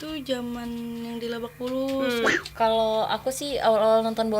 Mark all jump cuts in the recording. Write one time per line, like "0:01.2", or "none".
0:02.3